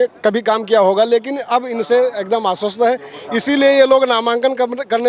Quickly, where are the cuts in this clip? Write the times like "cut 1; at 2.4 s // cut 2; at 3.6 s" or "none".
none